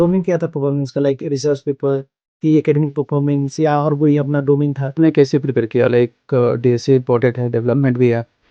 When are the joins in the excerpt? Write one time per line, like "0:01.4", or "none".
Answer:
0:05.0